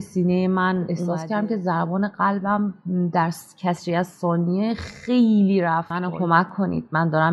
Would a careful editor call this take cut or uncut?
cut